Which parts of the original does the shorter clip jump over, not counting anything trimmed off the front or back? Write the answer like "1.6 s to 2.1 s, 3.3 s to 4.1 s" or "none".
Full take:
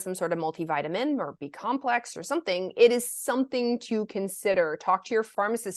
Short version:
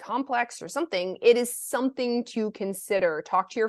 none